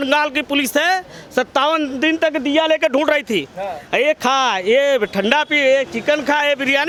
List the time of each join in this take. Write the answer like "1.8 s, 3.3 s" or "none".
none